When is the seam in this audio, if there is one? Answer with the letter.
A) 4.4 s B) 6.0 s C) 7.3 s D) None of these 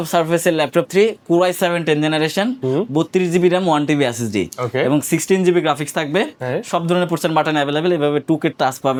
D